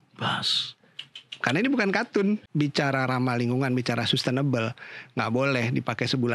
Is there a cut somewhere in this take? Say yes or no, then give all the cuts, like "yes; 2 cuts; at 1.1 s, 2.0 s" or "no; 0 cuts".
yes; 1 cut; at 2.4 s